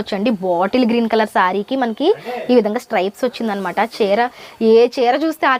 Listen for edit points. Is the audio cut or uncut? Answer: uncut